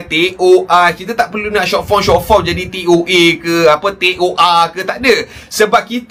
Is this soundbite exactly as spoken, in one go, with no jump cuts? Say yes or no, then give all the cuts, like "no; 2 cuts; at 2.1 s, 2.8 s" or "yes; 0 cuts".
yes; 0 cuts